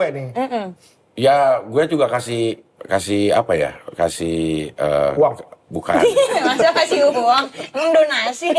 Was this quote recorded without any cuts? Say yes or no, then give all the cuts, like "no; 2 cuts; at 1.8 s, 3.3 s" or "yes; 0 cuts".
yes; 0 cuts